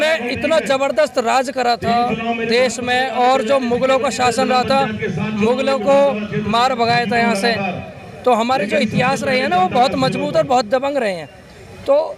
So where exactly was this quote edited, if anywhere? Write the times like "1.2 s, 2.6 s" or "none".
none